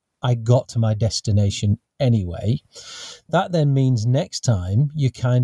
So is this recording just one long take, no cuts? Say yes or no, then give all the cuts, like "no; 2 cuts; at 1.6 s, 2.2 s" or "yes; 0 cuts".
yes; 0 cuts